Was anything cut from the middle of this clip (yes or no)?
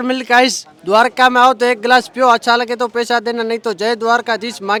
no